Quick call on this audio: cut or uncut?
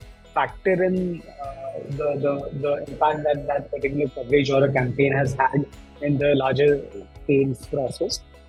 uncut